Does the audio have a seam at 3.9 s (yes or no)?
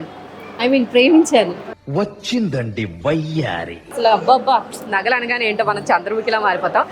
yes